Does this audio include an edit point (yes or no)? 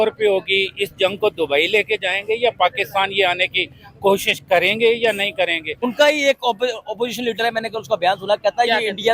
yes